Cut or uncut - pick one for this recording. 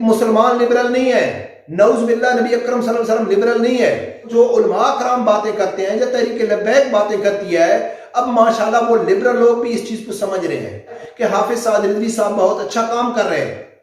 cut